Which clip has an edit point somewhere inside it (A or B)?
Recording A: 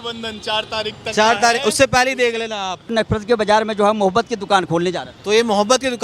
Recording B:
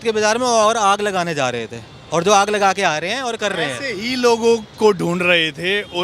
A